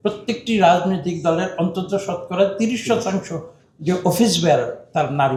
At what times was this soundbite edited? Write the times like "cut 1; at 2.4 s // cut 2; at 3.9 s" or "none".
none